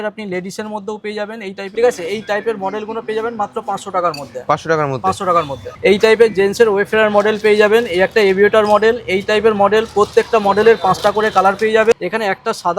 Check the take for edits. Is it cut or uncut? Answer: cut